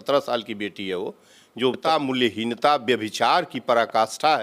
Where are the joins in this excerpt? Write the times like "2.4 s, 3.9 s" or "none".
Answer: 1.8 s